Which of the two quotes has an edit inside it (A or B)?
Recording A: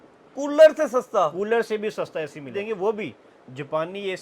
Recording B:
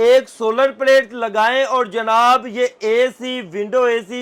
A